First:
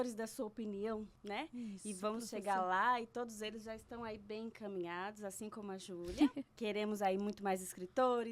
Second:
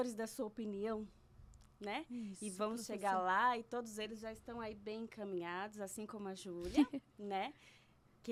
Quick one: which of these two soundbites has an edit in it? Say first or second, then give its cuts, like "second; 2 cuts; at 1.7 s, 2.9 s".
first; 2 cuts; at 1.1 s, 6.5 s